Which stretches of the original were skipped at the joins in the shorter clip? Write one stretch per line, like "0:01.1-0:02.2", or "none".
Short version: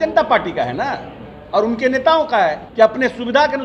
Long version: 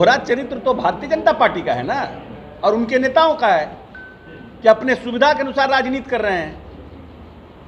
0:03.7-0:04.5

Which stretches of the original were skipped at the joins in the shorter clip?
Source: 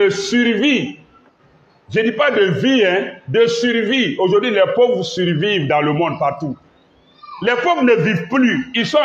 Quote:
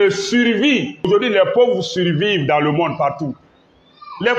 0:01.1-0:04.3

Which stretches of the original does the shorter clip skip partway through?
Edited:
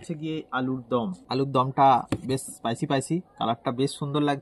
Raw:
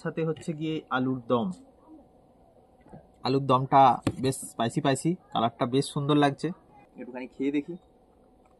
0:01.6-0:03.1

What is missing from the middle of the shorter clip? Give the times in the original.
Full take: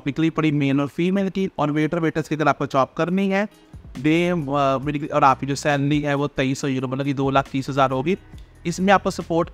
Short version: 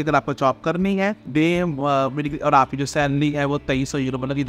0:03.5-0:03.9

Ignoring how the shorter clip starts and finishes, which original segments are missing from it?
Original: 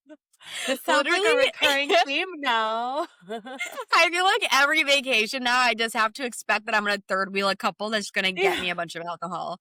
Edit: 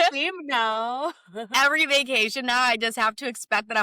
0:03.4-0:04.5

